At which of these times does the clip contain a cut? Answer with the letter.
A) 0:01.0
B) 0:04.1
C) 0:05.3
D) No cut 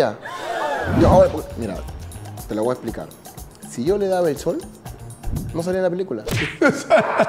A